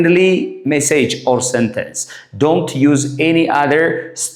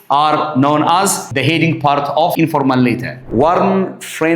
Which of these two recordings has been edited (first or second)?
second